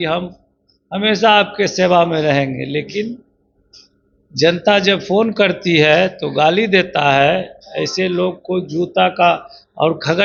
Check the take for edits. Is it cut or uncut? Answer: uncut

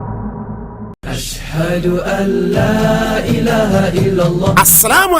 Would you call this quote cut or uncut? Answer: cut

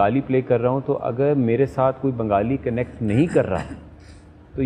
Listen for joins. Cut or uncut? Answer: uncut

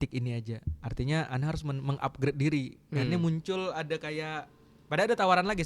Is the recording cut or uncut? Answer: uncut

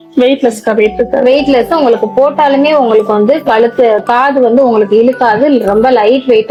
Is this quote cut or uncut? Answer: uncut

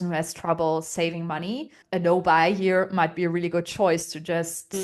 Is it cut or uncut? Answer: uncut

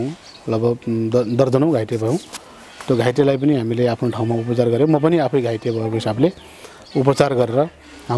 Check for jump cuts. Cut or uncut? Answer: uncut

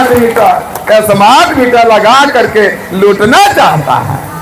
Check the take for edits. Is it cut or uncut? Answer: uncut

